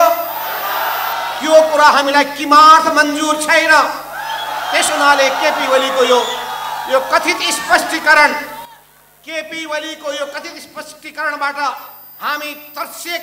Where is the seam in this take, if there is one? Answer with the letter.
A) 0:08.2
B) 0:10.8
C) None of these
C